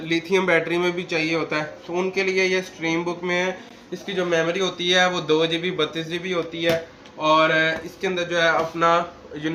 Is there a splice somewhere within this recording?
no; 0 cuts

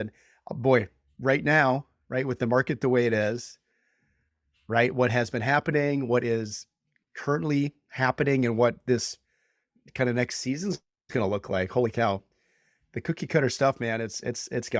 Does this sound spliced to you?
no; 0 cuts

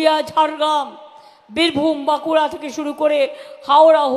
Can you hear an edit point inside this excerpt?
no; 0 cuts

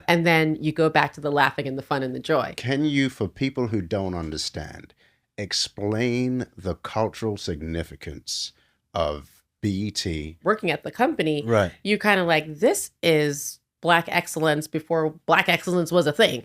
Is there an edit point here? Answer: yes; 2 cuts; at 2.6 s, 10.4 s

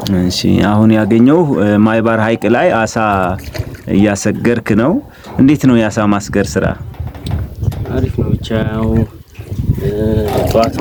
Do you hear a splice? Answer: no; 0 cuts

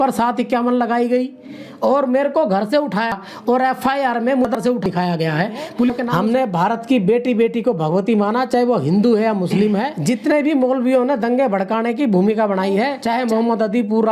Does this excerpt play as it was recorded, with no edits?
no; 3 cuts; at 6.0 s, 9.9 s, 13.0 s

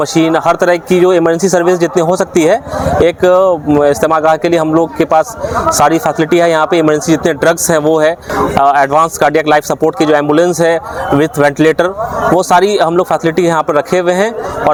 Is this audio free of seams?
yes; 0 cuts

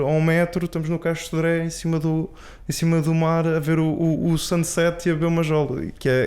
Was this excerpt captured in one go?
yes; 0 cuts

